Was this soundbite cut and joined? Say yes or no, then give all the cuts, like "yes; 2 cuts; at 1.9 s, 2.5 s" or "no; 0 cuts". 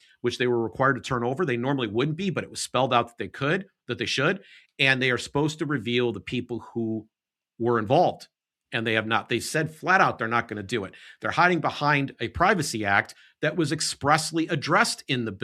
no; 0 cuts